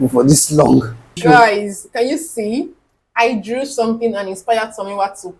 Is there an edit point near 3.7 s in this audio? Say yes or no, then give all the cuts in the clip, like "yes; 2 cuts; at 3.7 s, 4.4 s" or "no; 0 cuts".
no; 1 cut; at 1.2 s